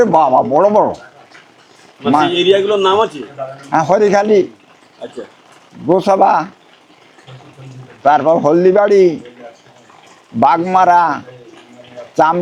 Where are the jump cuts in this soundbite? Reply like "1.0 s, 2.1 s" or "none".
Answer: none